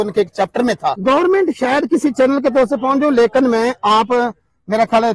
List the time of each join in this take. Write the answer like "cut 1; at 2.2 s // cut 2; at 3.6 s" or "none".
cut 1; at 1.0 s